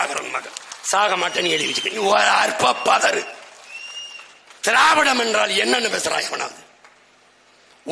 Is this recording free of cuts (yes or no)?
no